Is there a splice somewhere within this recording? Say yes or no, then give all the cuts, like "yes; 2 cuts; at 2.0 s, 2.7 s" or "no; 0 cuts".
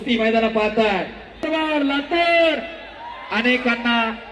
yes; 1 cut; at 1.4 s